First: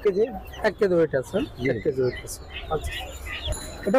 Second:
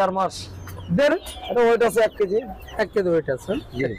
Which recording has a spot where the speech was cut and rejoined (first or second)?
second